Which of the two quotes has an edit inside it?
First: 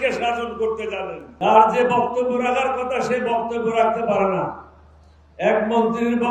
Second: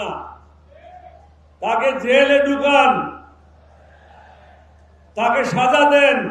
first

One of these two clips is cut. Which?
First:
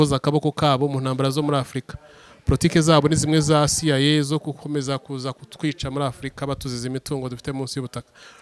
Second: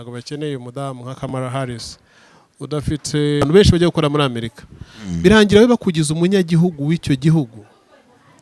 second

